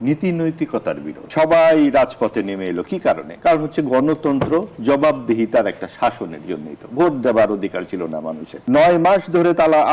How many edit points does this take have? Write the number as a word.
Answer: three